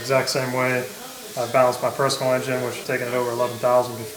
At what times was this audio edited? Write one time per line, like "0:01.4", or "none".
0:02.8